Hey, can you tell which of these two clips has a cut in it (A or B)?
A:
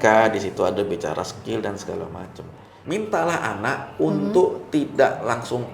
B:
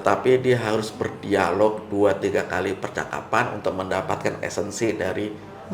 A